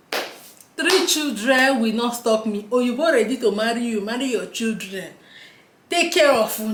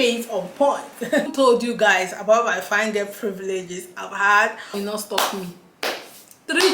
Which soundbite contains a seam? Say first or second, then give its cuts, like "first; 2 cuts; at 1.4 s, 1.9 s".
second; 2 cuts; at 1.3 s, 4.8 s